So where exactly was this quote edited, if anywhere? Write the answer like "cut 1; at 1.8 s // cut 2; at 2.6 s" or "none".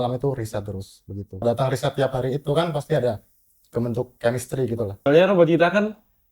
cut 1; at 1.4 s // cut 2; at 5.0 s